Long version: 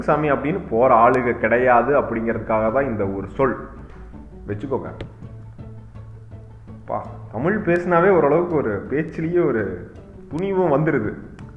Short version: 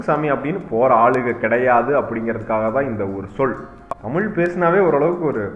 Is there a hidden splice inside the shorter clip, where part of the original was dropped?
yes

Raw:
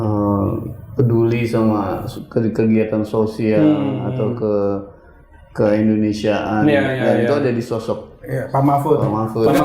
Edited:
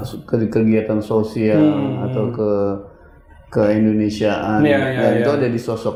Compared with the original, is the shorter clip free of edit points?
yes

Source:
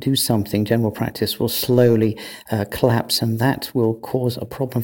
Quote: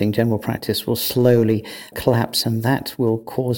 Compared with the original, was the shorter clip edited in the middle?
yes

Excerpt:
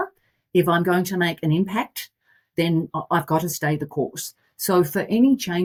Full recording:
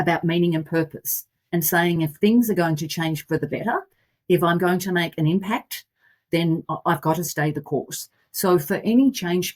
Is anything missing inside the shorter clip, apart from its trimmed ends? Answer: no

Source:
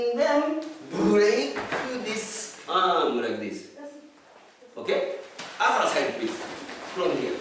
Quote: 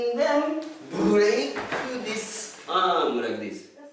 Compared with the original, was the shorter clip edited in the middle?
no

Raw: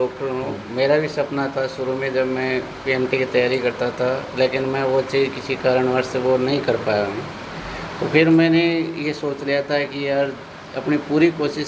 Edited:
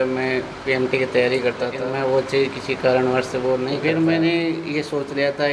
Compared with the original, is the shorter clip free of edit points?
no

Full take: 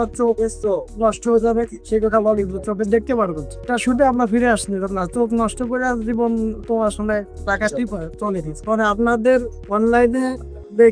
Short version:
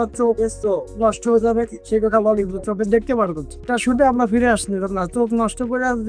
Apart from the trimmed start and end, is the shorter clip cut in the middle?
no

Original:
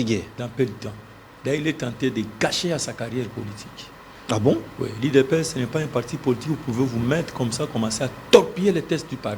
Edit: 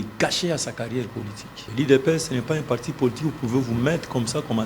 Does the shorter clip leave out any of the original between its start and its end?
yes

